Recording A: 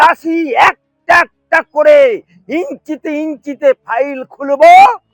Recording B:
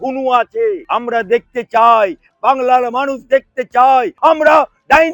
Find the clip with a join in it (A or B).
B